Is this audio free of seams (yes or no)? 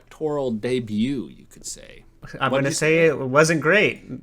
no